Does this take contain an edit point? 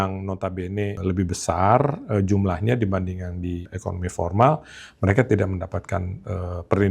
yes; 2 cuts; at 1.0 s, 3.7 s

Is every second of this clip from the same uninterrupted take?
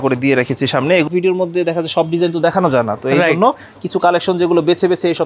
no; 1 cut; at 1.1 s

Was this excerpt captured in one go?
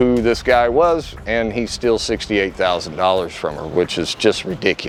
yes; 0 cuts

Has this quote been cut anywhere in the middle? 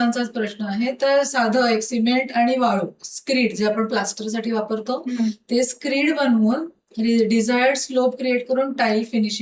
no; 0 cuts

